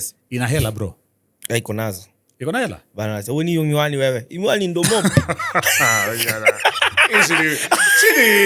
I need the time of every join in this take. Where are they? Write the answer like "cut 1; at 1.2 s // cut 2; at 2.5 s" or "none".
none